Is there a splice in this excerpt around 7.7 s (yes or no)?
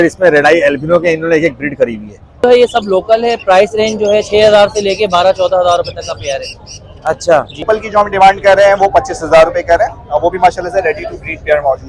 yes